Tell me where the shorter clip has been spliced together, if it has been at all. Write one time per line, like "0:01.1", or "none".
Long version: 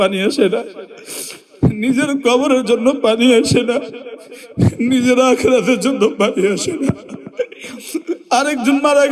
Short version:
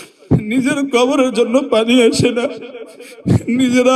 none